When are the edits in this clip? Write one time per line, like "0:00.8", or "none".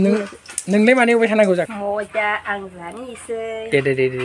0:01.7

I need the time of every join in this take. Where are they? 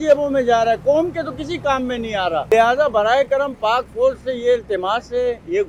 none

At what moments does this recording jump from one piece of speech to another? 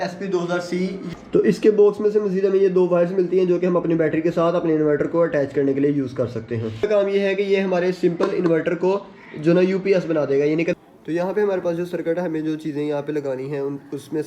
0:01.0
0:06.8
0:10.7

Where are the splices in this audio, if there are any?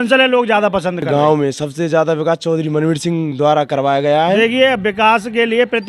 0:01.1
0:04.4

